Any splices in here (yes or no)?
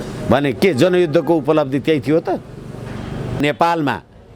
yes